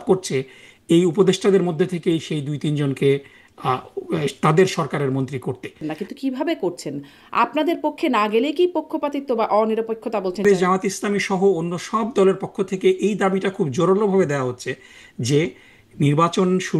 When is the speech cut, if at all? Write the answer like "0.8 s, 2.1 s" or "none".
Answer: 5.8 s, 10.4 s